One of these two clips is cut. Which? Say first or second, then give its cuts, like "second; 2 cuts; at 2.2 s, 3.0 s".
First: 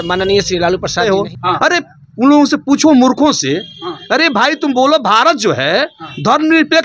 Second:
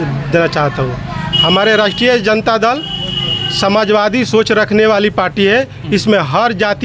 first; 1 cut; at 1.0 s